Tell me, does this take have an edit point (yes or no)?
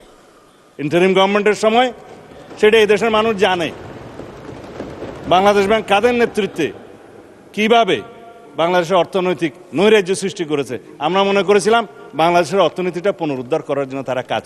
no